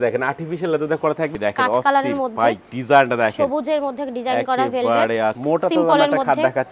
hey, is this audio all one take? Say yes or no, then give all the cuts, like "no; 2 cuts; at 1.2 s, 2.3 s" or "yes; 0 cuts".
no; 2 cuts; at 1.3 s, 5.4 s